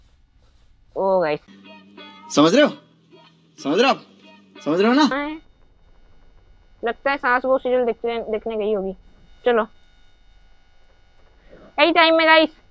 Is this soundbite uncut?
no; 1 cut; at 5.1 s

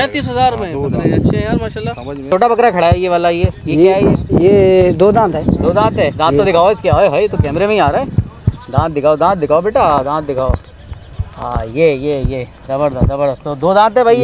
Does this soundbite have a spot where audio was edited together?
yes; 1 cut; at 2.3 s

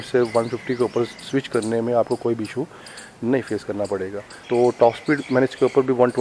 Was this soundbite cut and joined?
yes; 1 cut; at 4.3 s

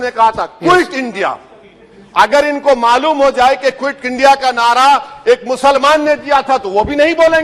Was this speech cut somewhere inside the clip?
no; 0 cuts

